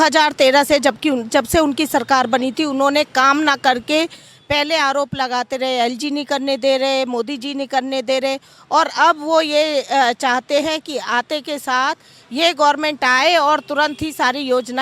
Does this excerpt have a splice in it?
no; 0 cuts

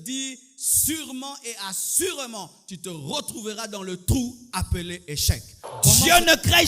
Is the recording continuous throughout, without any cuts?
no; 1 cut; at 5.7 s

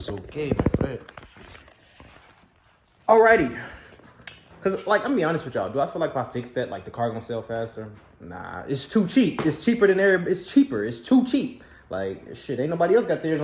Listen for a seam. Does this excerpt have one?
no; 0 cuts

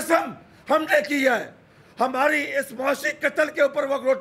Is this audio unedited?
yes; 0 cuts

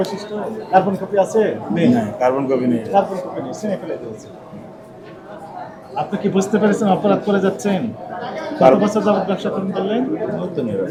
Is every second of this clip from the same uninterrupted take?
yes; 0 cuts

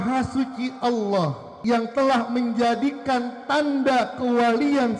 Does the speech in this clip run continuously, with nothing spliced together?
no; 1 cut; at 1.5 s

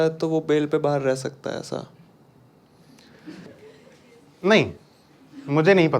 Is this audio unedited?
no; 1 cut; at 3.5 s

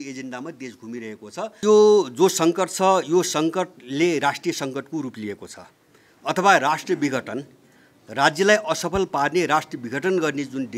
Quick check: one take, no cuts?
no; 1 cut; at 1.6 s

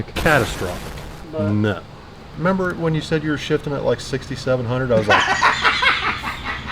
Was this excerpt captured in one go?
no; 1 cut; at 2.3 s

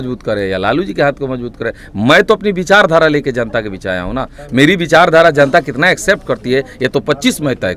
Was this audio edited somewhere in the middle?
no; 0 cuts

